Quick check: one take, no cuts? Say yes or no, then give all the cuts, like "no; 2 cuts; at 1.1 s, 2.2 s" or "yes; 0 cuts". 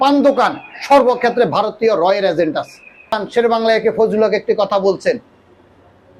no; 1 cut; at 3.2 s